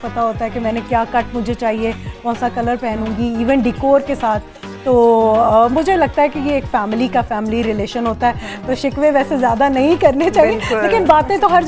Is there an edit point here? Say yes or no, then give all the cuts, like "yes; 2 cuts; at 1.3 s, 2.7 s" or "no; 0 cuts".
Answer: no; 0 cuts